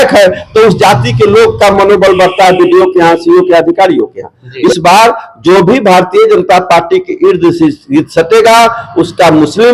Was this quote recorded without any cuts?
no; 1 cut; at 4.5 s

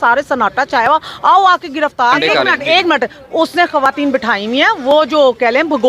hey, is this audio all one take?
no; 1 cut; at 2.2 s

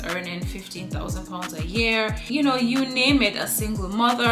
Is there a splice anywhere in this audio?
no; 0 cuts

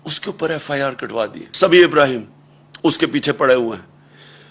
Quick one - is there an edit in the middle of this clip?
yes; 1 cut; at 1.5 s

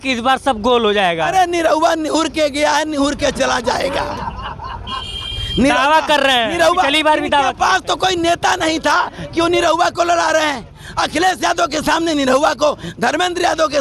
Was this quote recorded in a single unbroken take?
yes; 0 cuts

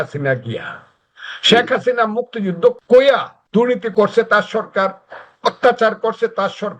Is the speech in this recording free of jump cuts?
no; 2 cuts; at 2.8 s, 3.9 s

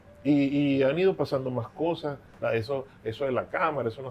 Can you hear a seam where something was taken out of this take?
yes; 1 cut; at 2.3 s

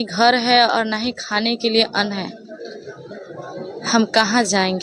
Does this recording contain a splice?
no; 0 cuts

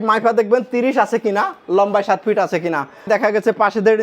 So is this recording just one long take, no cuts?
no; 1 cut; at 3.1 s

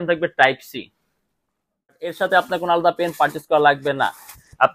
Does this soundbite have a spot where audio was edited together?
yes; 1 cut; at 2.1 s

